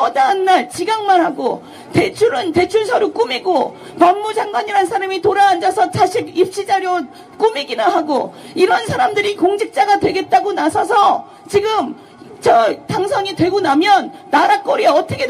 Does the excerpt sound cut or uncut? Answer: uncut